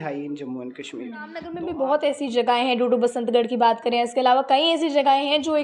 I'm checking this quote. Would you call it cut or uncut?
cut